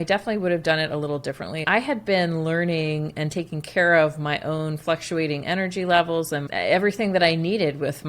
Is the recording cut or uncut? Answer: cut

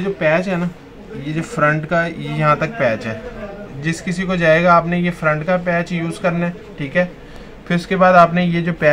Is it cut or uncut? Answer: uncut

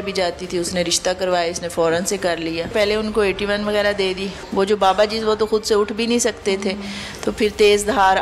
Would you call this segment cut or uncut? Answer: cut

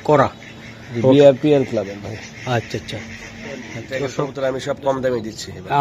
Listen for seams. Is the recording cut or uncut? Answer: cut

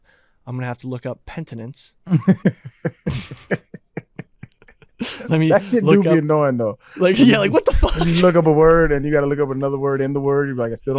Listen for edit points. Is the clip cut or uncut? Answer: uncut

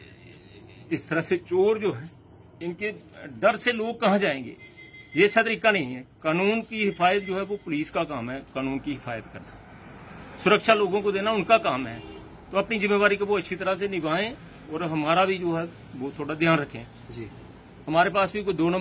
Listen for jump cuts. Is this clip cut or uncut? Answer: uncut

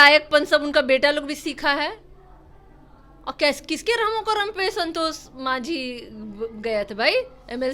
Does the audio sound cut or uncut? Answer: uncut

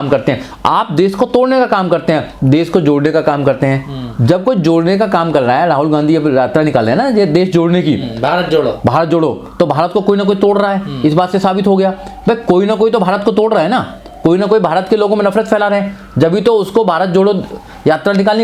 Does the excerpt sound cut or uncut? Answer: uncut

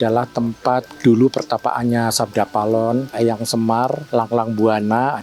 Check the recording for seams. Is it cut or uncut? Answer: cut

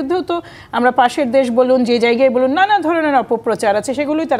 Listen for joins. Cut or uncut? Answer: uncut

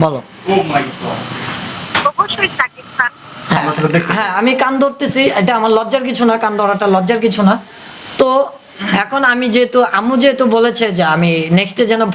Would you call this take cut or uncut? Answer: cut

